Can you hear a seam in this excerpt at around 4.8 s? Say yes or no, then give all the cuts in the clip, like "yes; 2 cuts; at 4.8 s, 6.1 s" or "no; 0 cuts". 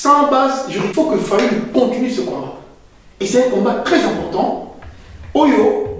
no; 1 cut; at 0.9 s